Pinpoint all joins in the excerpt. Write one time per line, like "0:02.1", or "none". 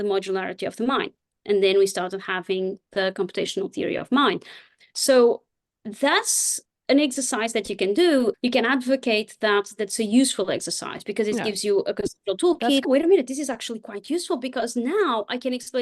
0:08.3
0:12.9